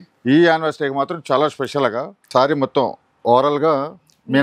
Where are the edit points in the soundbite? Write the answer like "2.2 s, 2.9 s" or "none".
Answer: 2.2 s